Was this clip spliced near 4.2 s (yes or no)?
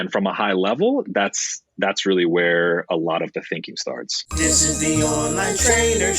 yes